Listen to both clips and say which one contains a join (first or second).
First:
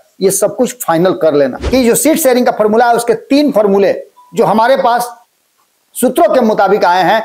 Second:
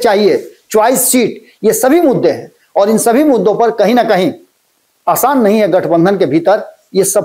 first